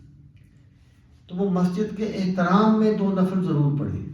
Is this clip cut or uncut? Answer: uncut